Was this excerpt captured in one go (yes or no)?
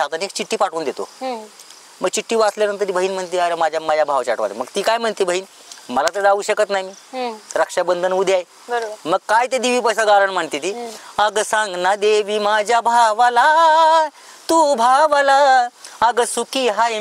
yes